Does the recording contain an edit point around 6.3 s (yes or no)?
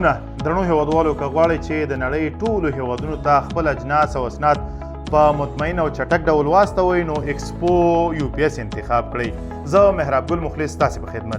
no